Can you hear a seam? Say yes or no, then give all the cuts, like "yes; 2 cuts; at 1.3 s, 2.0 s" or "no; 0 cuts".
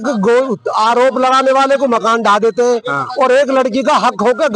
no; 0 cuts